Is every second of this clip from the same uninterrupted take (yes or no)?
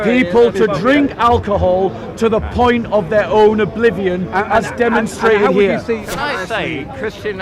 no